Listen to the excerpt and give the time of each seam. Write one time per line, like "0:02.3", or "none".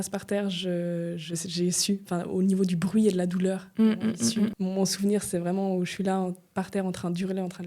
0:04.5